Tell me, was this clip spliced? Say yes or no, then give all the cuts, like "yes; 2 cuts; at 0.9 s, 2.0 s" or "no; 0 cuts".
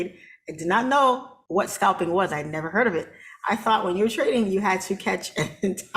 yes; 1 cut; at 1.3 s